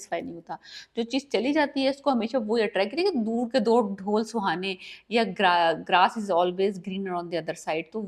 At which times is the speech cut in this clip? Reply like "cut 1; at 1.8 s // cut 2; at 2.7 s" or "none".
none